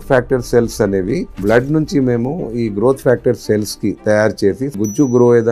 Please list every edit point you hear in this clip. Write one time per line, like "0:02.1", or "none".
0:01.3
0:04.8